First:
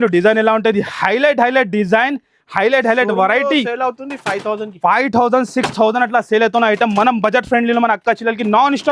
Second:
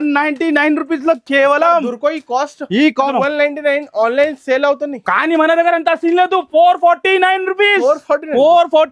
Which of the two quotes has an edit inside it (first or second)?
second